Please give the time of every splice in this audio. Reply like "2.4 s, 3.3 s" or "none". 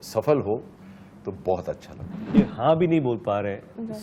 2.3 s